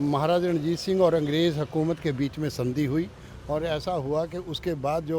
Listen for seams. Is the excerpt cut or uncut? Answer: uncut